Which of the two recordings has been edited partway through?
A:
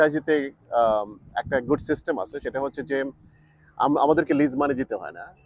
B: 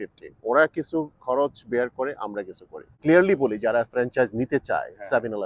B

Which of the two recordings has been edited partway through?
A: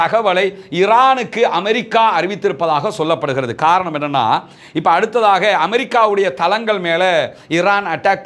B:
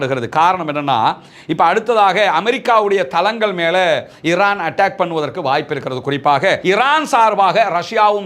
B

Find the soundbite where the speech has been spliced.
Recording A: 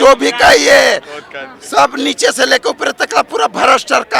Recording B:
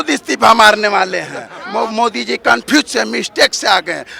B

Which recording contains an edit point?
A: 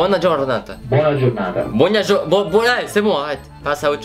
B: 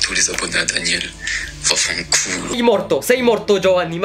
B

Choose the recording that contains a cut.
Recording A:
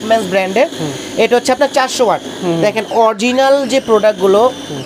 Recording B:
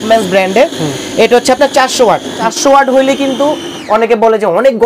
B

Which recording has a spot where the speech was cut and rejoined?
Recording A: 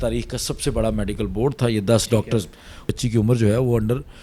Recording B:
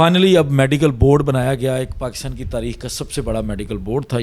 A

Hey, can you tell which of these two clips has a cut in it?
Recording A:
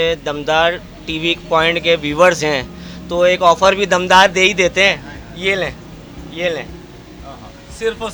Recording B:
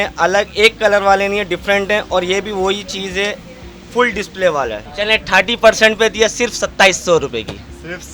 B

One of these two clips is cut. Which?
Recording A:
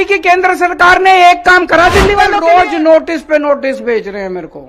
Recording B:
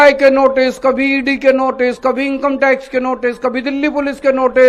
A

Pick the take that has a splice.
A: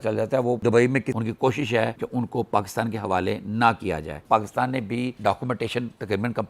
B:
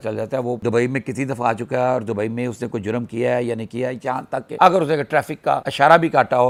A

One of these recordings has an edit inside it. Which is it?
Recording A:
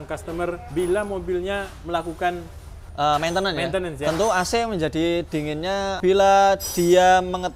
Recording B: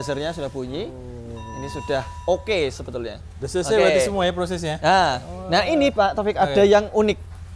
A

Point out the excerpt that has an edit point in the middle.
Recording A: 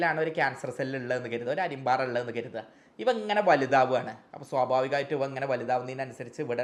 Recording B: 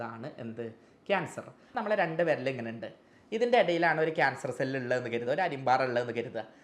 B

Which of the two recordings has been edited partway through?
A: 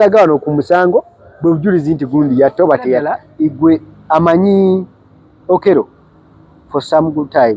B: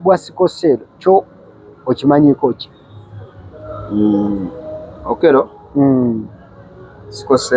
A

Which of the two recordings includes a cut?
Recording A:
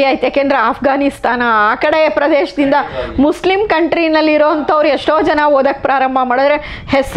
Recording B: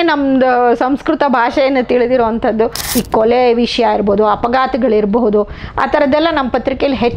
B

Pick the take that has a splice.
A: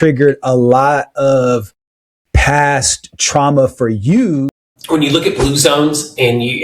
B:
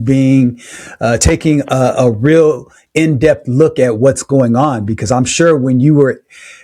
A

